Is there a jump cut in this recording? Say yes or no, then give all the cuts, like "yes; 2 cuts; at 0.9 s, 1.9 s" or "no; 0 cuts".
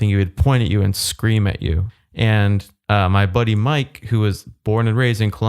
yes; 1 cut; at 1.9 s